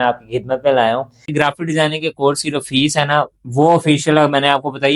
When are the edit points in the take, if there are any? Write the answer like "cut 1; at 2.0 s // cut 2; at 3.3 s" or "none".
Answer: cut 1; at 1.3 s